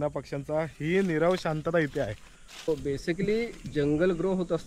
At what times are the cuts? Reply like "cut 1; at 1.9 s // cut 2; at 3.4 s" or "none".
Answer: cut 1; at 2.7 s